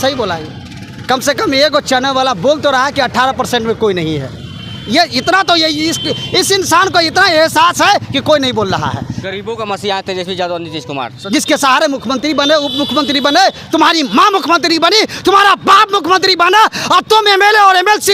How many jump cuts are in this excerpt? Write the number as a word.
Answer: two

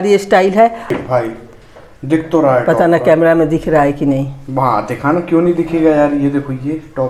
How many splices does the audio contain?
one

